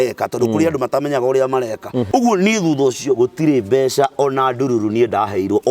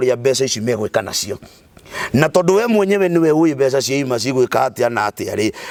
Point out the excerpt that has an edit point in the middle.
first; 1 cut; at 2.1 s

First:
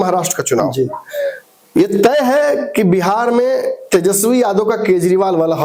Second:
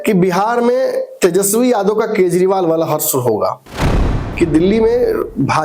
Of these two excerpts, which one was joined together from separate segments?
second; 1 cut; at 3.9 s

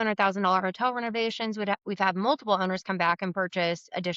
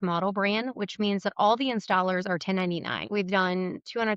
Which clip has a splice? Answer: second; 1 cut; at 3.1 s

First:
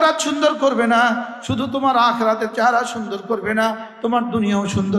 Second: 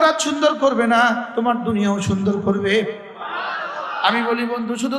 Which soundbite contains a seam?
second; 1 cut; at 1.3 s

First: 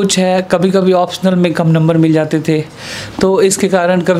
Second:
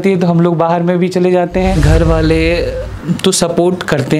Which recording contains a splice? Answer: second; 1 cut; at 1.8 s

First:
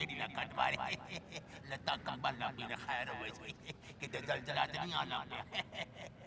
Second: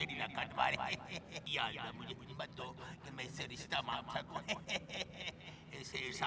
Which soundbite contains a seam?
second; 1 cut; at 1.4 s

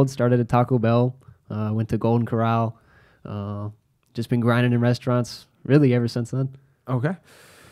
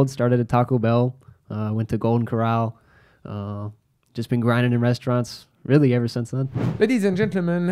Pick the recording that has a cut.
second; 1 cut; at 6.6 s

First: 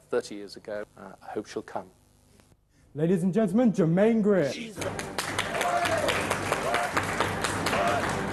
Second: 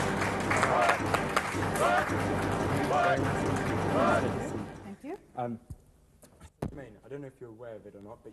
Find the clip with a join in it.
second; 1 cut; at 1.9 s

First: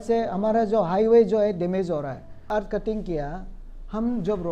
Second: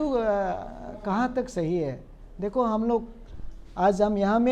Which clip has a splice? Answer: first; 1 cut; at 2.4 s

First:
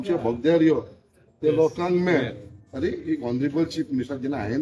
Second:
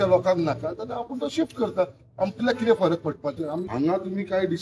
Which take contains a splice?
second; 1 cut; at 3.6 s

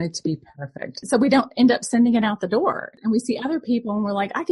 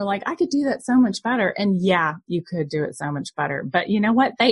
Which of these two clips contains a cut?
first; 2 cuts; at 1.0 s, 2.9 s

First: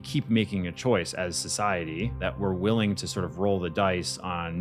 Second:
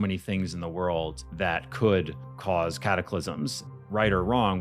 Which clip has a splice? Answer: second; 2 cuts; at 1.2 s, 3.7 s

